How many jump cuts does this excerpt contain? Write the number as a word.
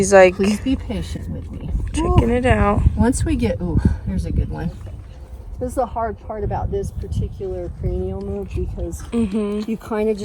one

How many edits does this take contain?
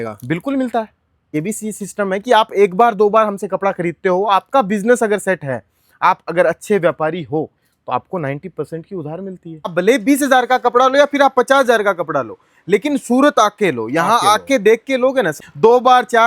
three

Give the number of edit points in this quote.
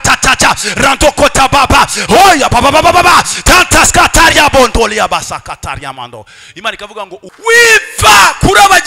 one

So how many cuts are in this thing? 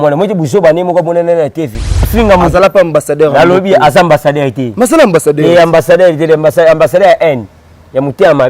one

